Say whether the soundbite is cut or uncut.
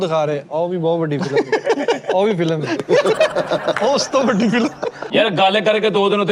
cut